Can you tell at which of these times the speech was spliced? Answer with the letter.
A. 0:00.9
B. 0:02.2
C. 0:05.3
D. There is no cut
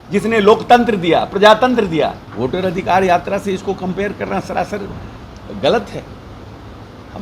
B